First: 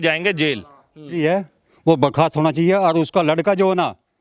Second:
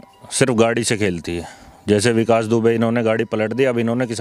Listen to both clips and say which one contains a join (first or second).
first